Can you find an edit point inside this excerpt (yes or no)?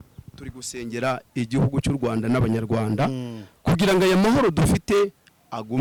no